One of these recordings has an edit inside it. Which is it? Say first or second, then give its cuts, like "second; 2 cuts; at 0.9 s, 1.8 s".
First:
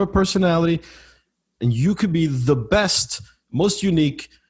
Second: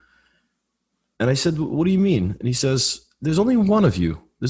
first; 1 cut; at 1.4 s